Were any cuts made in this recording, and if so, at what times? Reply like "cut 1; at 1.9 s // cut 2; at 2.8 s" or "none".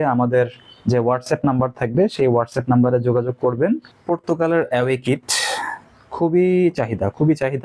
cut 1; at 3.9 s